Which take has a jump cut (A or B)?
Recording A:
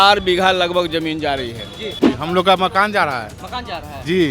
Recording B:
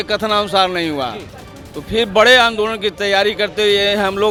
A